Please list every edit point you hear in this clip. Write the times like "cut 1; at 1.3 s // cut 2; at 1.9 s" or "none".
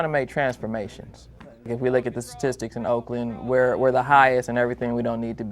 cut 1; at 1.7 s